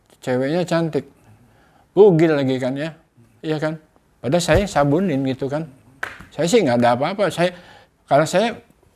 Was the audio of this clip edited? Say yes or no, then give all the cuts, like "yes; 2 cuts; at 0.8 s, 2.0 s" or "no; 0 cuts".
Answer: no; 0 cuts